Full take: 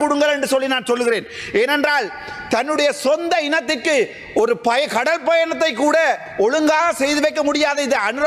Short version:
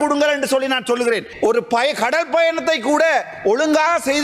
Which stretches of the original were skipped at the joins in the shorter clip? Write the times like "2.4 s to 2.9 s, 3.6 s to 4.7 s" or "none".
1.3 s to 4.2 s